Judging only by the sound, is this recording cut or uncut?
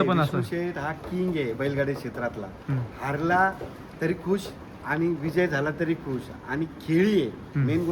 uncut